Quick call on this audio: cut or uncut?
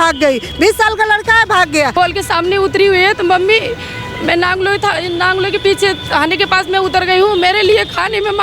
cut